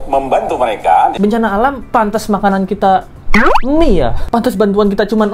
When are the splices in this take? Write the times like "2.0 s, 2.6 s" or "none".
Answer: 1.1 s